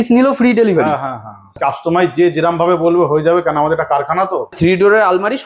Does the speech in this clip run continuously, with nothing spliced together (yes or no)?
no